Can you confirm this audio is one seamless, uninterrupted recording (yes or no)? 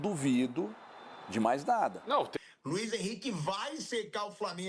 no